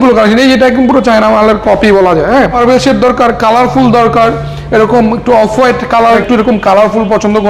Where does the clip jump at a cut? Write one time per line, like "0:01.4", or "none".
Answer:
0:02.6
0:06.2